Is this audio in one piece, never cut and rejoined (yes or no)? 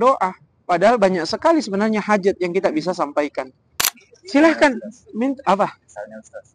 no